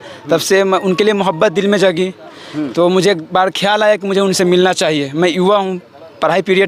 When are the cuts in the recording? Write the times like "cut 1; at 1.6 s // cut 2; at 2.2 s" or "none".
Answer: none